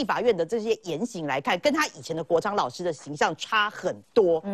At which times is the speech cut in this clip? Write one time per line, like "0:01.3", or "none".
none